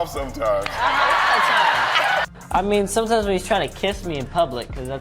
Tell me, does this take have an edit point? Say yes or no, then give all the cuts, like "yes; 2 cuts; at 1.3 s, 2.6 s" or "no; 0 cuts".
yes; 1 cut; at 2.3 s